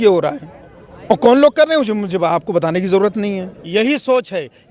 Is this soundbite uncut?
no; 1 cut; at 3.5 s

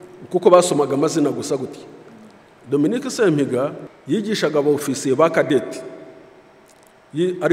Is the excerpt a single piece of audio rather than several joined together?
no; 1 cut; at 3.9 s

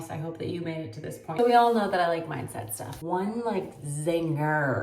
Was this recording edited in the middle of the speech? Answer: yes; 1 cut; at 1.4 s

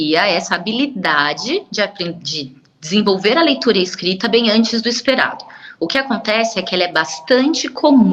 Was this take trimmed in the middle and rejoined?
no; 0 cuts

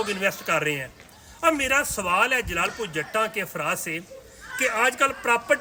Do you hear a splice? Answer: no; 0 cuts

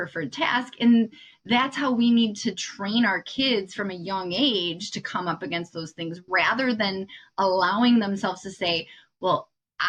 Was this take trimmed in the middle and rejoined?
no; 0 cuts

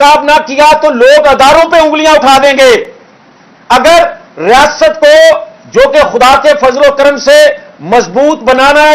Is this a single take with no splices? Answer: yes; 0 cuts

